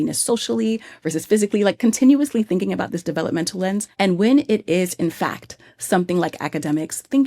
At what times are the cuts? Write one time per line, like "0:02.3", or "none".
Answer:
0:03.9